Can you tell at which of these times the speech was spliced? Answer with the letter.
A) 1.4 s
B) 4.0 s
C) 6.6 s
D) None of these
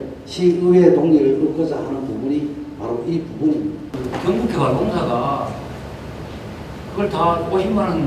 B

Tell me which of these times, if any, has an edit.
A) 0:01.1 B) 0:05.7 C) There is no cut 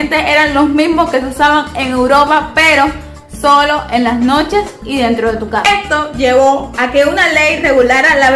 B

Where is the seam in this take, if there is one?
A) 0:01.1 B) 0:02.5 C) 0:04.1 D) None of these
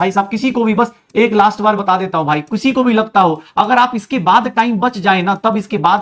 D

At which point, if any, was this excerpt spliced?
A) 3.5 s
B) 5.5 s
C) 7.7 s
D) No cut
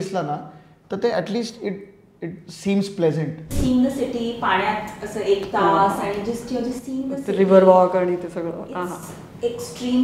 A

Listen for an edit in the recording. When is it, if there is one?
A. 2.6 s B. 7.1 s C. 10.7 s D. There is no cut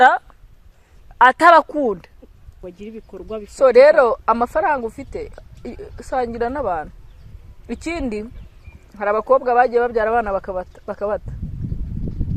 A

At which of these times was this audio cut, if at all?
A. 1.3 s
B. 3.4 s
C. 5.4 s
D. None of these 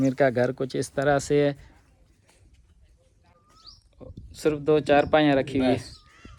D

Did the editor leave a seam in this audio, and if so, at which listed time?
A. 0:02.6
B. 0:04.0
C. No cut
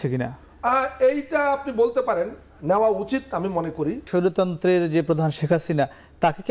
B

